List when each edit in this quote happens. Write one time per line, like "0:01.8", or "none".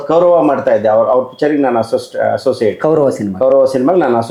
none